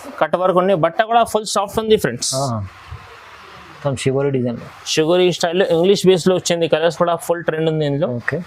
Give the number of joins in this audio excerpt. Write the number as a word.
zero